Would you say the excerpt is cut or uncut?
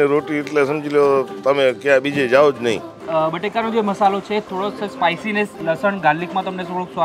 cut